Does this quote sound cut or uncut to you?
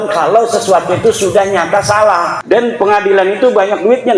cut